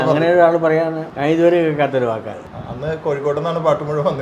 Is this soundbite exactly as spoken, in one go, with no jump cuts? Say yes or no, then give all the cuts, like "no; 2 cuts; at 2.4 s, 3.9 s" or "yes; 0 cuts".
no; 2 cuts; at 1.1 s, 2.5 s